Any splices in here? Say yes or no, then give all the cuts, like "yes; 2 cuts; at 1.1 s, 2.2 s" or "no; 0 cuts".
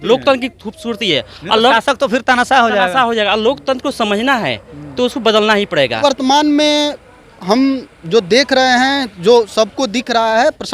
yes; 1 cut; at 6.0 s